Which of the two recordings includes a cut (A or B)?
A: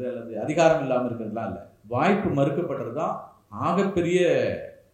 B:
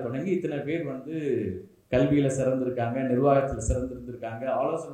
B